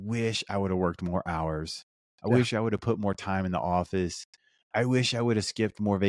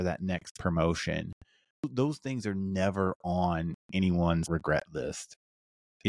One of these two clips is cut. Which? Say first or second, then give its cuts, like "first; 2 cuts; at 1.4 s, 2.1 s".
second; 2 cuts; at 1.9 s, 4.4 s